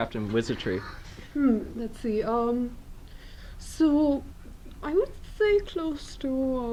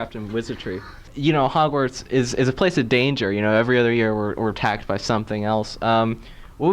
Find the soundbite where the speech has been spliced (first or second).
second